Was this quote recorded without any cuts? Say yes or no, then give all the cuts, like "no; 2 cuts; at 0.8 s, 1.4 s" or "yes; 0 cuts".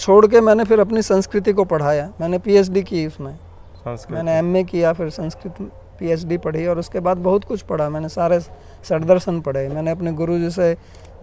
yes; 0 cuts